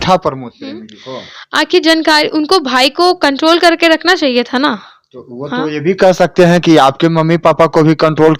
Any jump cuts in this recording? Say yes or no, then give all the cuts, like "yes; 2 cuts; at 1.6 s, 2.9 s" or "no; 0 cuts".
no; 0 cuts